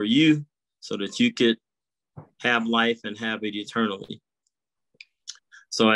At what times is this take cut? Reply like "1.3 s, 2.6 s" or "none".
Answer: none